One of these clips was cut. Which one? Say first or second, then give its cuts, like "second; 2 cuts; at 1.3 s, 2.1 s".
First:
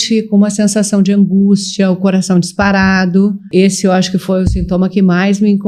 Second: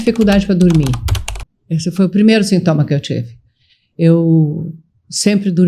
first; 1 cut; at 3.5 s